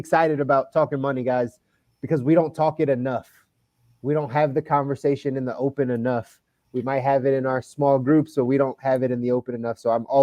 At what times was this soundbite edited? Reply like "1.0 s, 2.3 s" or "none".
none